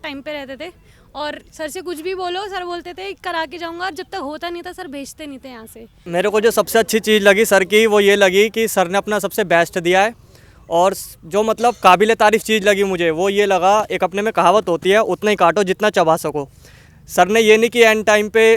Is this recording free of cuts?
no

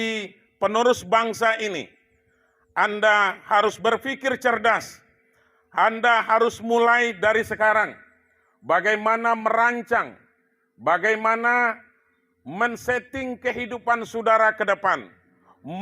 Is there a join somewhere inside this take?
yes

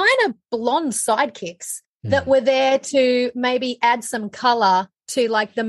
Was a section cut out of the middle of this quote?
no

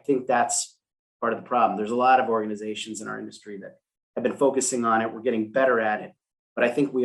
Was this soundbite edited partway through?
no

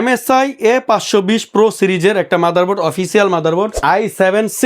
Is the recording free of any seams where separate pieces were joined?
no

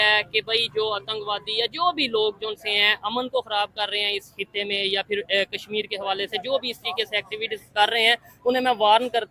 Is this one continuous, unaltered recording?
yes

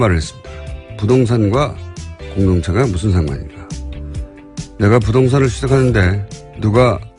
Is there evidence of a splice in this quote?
no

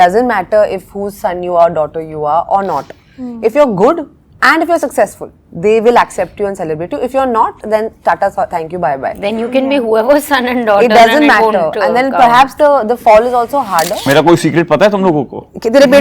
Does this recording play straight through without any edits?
no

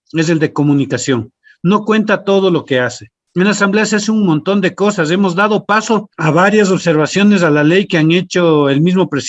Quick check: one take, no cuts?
no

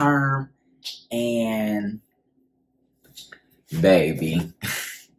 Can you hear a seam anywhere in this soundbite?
no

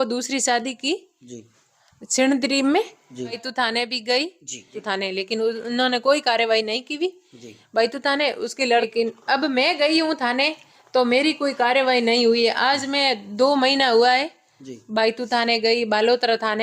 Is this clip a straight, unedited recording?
no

